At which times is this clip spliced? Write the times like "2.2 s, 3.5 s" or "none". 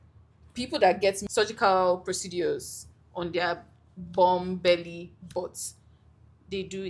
1.2 s